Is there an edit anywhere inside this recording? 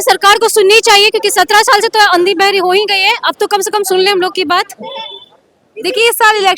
no; 0 cuts

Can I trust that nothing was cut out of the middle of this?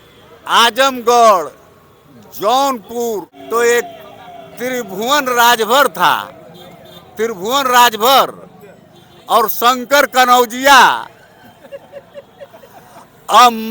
no; 1 cut; at 3.3 s

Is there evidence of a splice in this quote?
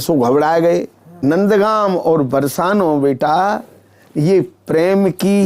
yes; 1 cut; at 1.0 s

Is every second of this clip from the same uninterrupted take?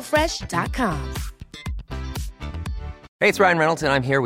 no; 1 cut; at 3.0 s

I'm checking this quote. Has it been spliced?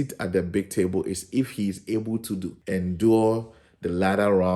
yes; 1 cut; at 2.5 s

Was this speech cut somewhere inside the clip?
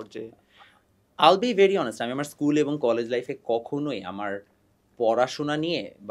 no; 0 cuts

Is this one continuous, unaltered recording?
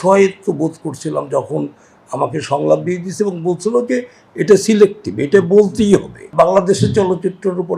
no; 1 cut; at 6.3 s

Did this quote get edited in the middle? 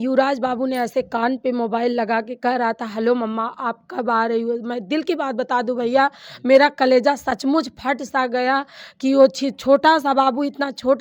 no; 0 cuts

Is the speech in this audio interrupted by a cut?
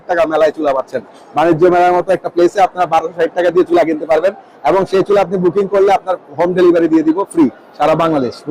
no; 0 cuts

